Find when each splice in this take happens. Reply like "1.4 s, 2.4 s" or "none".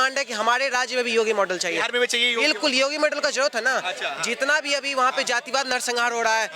none